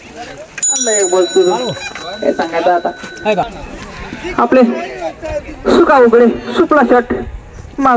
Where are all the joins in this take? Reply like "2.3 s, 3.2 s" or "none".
3.6 s

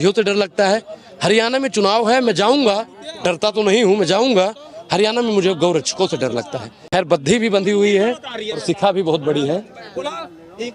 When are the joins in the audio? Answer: 6.7 s

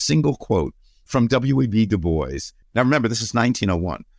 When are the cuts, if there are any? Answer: 2.5 s

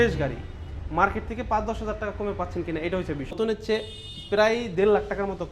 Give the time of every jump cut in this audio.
3.3 s

